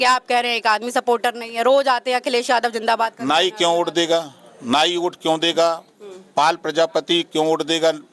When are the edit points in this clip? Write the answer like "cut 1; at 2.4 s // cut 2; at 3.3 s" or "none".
none